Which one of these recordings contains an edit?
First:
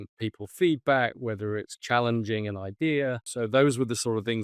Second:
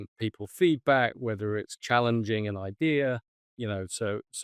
first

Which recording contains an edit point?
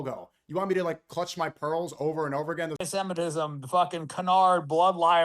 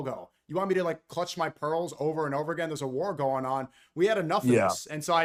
first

